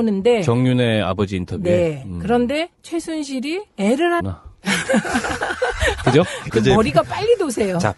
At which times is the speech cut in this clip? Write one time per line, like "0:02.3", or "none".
none